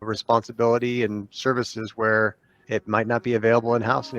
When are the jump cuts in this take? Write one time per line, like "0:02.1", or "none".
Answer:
0:02.5